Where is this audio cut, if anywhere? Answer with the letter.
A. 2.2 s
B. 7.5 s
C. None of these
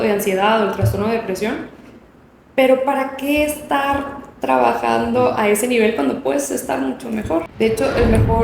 B